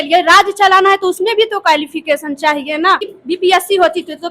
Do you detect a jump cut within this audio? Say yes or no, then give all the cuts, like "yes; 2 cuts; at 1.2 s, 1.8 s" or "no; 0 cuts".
yes; 1 cut; at 3.2 s